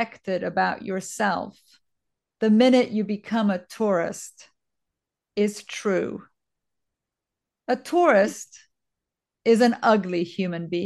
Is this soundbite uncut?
yes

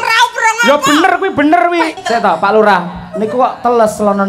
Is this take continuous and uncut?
no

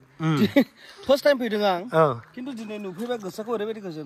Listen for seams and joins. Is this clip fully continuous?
yes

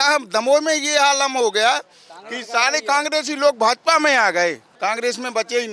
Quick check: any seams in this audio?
yes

